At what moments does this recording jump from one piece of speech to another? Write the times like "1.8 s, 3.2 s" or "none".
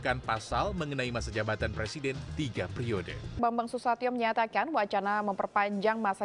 3.4 s